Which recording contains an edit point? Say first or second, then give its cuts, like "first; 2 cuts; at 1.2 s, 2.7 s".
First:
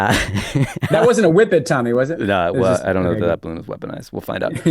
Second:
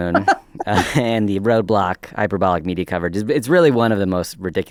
first; 1 cut; at 0.9 s